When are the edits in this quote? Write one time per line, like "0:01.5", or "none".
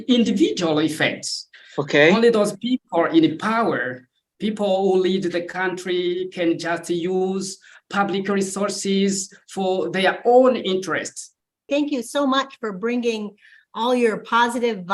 0:11.6